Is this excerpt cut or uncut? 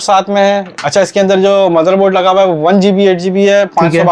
uncut